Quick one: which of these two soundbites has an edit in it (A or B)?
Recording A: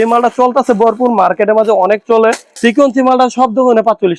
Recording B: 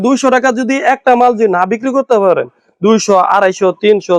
A